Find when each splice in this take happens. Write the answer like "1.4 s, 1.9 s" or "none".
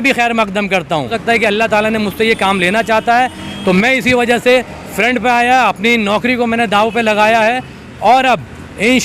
1.2 s